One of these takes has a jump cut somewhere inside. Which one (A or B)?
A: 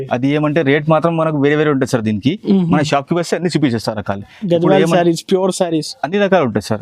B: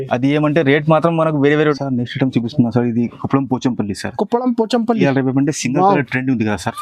B